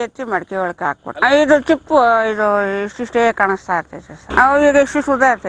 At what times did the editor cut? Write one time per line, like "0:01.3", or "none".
0:04.1